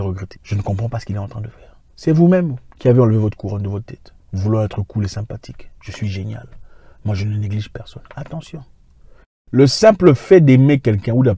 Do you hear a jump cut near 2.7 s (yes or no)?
no